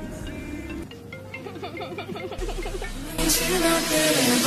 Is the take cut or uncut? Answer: uncut